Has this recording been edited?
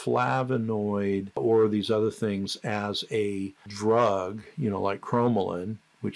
yes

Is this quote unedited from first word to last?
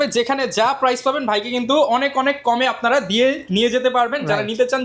yes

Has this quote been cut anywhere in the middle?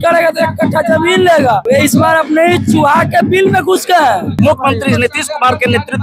yes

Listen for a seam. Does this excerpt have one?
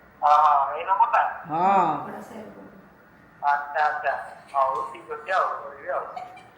no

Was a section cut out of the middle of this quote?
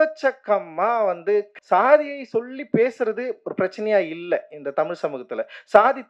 yes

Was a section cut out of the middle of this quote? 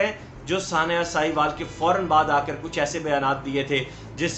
no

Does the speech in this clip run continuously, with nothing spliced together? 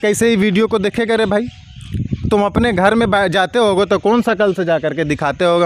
yes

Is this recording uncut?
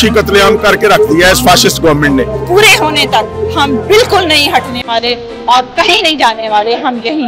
no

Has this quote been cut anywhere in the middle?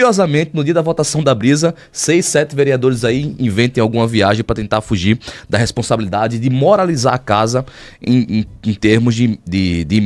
no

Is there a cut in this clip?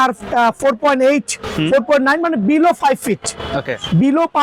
no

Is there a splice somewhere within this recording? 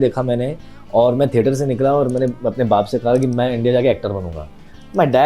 no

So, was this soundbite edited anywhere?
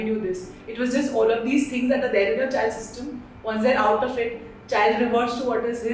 no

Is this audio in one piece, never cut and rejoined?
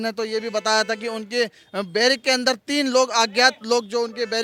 yes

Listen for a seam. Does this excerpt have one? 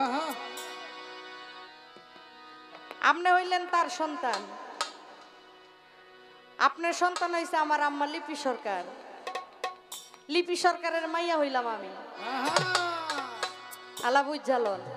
no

